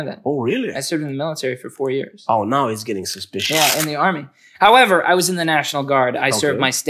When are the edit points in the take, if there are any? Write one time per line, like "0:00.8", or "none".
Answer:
none